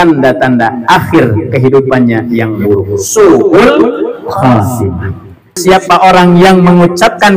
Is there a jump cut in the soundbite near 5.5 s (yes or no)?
yes